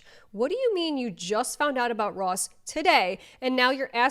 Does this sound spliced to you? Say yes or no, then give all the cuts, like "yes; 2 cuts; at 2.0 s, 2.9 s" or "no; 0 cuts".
no; 0 cuts